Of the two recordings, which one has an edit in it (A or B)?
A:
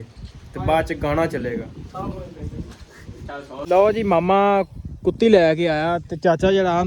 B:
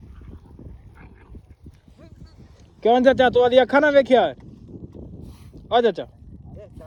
A